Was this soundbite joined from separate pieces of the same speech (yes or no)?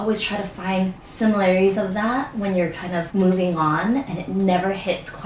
yes